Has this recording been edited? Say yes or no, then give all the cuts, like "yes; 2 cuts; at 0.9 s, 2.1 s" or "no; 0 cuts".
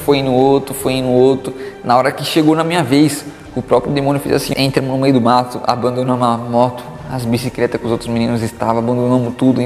yes; 1 cut; at 4.5 s